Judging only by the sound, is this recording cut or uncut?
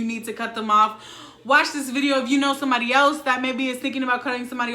uncut